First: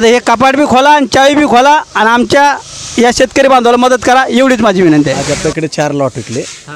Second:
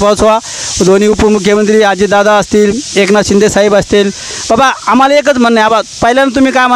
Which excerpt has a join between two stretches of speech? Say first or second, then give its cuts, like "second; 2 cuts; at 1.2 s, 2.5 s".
first; 1 cut; at 5.2 s